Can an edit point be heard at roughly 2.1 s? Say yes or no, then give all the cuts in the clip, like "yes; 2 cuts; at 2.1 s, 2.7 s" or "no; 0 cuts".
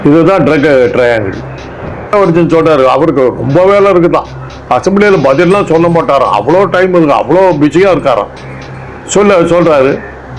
yes; 1 cut; at 2.1 s